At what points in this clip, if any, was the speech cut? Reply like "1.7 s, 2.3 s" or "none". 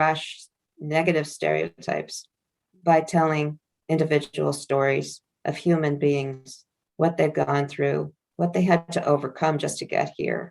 3.7 s, 8.2 s